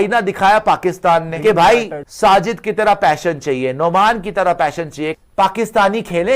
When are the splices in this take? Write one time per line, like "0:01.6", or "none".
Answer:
0:01.3
0:02.0
0:05.2